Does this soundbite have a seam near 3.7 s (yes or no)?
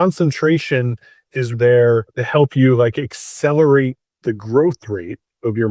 no